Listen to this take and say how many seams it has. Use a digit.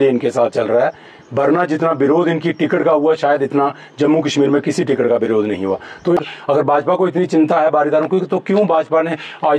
1